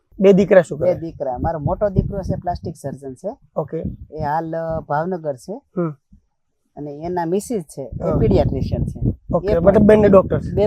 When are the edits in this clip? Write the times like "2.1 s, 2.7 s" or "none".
none